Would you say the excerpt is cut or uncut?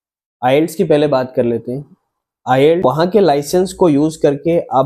cut